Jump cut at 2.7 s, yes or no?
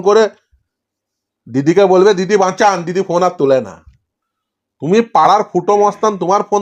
no